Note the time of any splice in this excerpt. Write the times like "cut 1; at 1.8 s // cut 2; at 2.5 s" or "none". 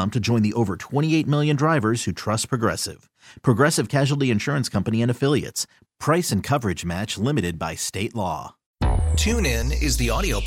cut 1; at 8.6 s

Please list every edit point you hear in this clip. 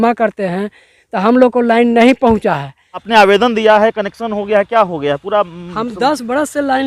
cut 1; at 3.1 s

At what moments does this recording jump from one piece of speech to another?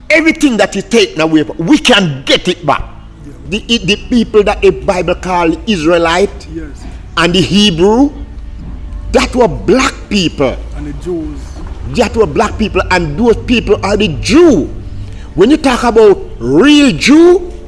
cut 1; at 3.6 s

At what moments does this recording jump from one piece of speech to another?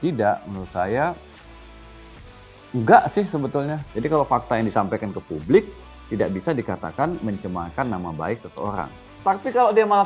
cut 1; at 3.8 s // cut 2; at 9.0 s

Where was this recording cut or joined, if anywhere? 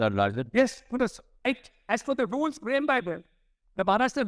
cut 1; at 1.3 s

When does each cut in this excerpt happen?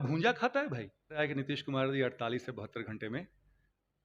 cut 1; at 1.2 s

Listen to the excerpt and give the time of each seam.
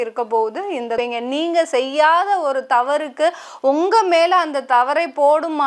cut 1; at 0.9 s

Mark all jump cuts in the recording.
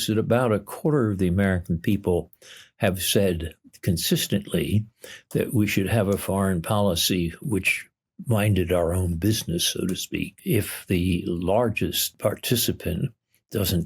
cut 1; at 10.4 s // cut 2; at 12.1 s

